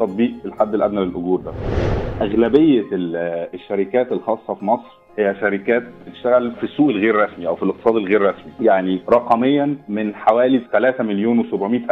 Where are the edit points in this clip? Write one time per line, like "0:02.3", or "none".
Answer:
0:01.9
0:06.6
0:08.8
0:09.9